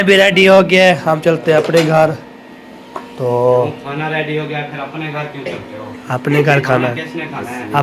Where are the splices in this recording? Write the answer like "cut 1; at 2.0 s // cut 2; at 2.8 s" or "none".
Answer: none